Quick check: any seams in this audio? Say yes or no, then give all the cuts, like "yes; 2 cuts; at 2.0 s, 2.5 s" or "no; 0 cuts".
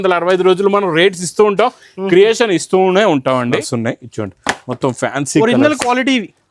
yes; 1 cut; at 3.7 s